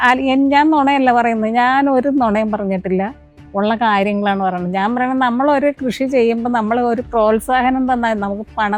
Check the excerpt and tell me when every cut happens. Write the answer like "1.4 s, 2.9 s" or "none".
none